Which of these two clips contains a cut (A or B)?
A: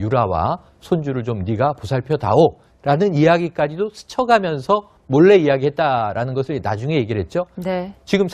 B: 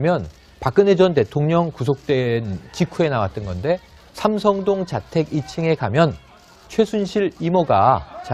A